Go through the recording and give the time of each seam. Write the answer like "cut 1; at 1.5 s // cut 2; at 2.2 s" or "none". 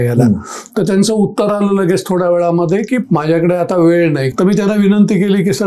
cut 1; at 3.0 s // cut 2; at 4.3 s